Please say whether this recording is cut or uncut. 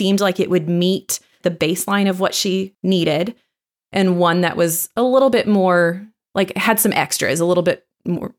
cut